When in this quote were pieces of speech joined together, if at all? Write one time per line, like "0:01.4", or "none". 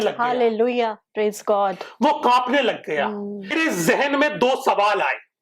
0:03.5